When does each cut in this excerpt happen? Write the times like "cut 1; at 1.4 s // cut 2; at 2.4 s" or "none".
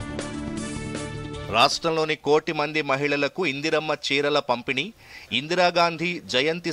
cut 1; at 1.5 s